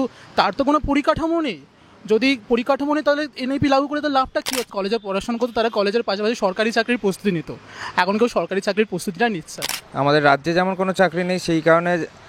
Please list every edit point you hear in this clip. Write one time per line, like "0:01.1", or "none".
0:04.7
0:09.8